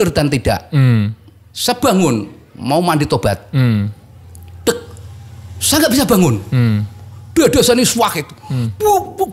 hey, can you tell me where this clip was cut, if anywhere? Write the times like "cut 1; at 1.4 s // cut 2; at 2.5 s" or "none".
none